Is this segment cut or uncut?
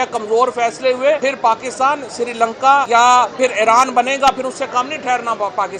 cut